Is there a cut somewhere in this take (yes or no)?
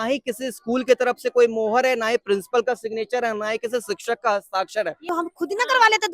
yes